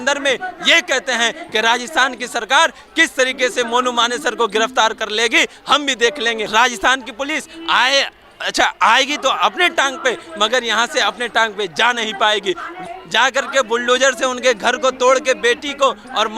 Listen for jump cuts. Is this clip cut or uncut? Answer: cut